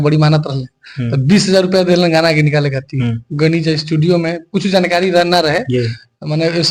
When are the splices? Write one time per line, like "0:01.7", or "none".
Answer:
none